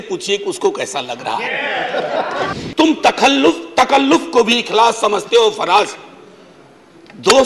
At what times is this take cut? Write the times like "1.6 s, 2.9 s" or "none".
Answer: 2.5 s